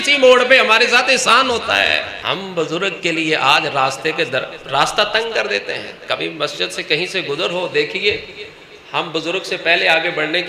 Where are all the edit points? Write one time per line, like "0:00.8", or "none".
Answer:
0:02.1

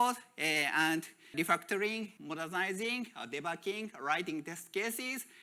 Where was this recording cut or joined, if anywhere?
0:01.3
0:02.2

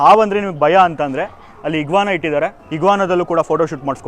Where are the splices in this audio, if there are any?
0:02.6

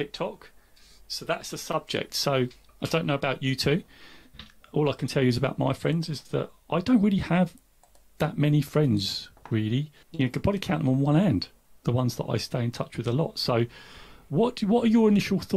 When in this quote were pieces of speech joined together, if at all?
0:02.6
0:10.0

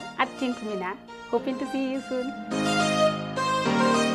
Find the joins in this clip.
none

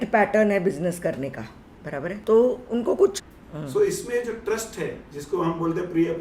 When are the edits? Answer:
0:02.2
0:03.3

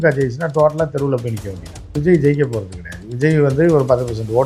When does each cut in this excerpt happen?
0:02.0

